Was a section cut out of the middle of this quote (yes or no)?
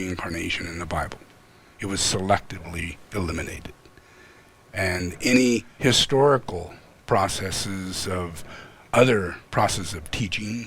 yes